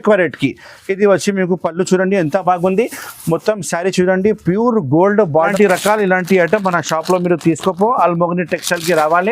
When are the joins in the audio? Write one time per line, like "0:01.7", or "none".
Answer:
0:05.5

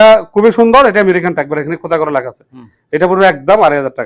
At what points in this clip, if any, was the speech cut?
none

